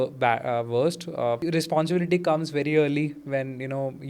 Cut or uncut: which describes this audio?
cut